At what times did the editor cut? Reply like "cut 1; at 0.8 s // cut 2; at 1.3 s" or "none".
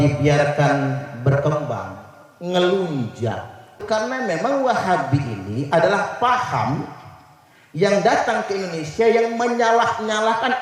cut 1; at 3.8 s